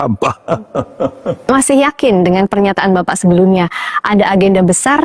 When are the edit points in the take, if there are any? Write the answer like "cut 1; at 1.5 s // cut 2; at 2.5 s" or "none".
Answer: cut 1; at 1.4 s